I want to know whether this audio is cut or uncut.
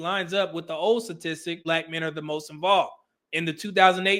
cut